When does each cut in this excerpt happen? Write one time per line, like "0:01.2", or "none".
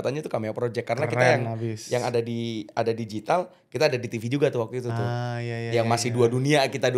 none